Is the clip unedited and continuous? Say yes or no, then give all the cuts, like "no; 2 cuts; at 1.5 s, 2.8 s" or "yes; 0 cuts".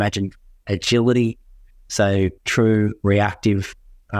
yes; 0 cuts